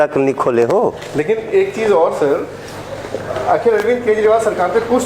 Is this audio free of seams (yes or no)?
yes